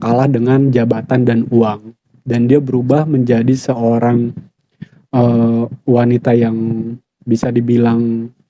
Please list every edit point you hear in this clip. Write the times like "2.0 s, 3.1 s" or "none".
none